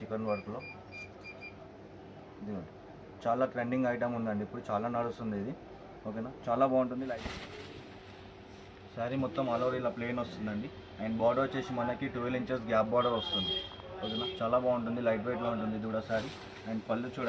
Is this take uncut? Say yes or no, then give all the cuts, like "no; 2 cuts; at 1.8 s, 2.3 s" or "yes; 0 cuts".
no; 1 cut; at 7.1 s